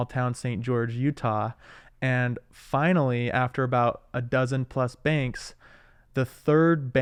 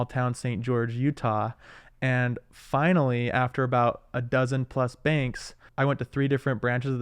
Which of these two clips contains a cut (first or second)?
second